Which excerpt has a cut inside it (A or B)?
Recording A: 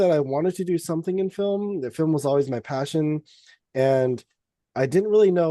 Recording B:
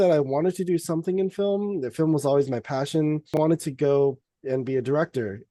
B